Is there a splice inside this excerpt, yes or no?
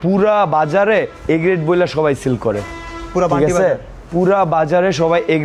no